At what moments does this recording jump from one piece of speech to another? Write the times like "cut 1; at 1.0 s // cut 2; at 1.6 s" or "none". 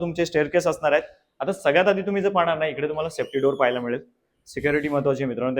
none